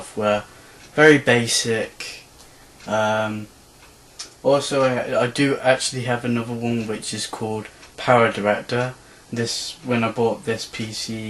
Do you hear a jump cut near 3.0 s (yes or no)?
no